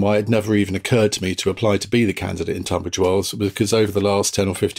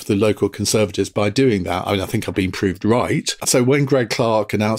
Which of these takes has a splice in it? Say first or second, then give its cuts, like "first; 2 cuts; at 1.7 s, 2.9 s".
second; 1 cut; at 3.4 s